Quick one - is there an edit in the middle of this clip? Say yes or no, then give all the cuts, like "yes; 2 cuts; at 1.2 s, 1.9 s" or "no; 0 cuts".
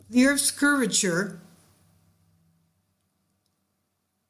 no; 0 cuts